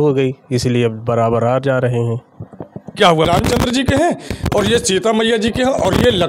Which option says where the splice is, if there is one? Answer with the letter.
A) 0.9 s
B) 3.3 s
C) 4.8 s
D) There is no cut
B